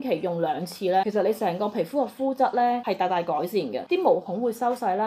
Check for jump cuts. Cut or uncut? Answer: uncut